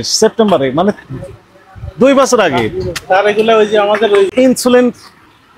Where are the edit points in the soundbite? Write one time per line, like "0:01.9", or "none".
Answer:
none